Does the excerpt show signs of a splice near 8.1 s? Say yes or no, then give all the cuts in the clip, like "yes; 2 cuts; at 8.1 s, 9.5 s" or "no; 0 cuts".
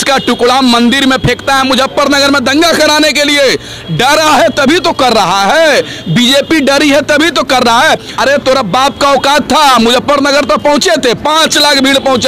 yes; 1 cut; at 8.1 s